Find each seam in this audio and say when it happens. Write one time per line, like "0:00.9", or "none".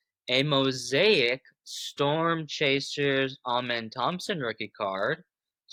none

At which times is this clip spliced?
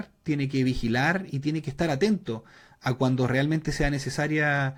none

